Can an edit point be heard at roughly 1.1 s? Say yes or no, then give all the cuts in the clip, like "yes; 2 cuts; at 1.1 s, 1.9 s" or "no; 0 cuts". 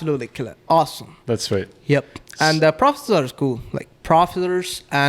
no; 0 cuts